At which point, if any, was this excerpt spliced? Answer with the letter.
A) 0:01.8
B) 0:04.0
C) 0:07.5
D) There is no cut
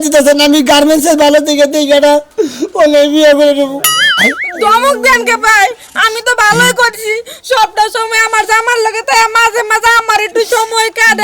B